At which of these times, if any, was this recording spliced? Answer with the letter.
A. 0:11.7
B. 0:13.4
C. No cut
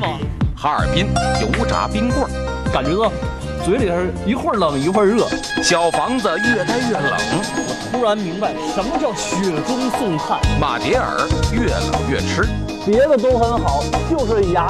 C